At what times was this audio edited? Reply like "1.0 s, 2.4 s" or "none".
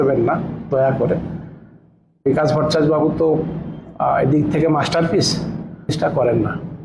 5.9 s